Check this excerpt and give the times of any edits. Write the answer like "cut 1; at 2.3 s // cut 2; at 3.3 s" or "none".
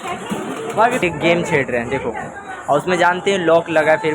cut 1; at 1.0 s